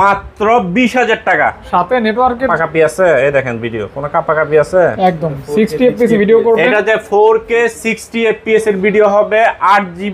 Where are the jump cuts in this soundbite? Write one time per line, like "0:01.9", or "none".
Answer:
0:02.5